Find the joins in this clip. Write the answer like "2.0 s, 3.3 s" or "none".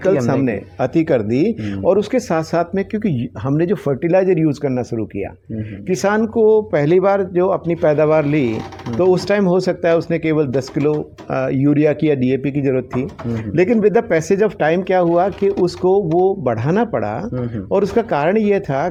none